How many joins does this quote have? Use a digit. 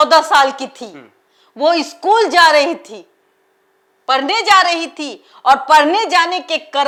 0